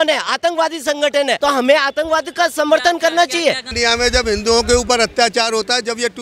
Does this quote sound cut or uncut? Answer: uncut